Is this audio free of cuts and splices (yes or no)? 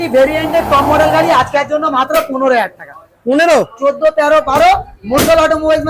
yes